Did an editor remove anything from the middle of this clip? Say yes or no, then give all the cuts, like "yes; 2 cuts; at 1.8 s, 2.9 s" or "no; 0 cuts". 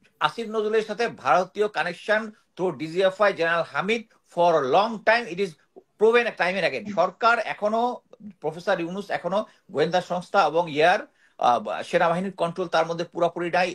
yes; 1 cut; at 6.9 s